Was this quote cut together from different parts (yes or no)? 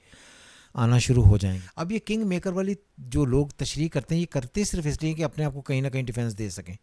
yes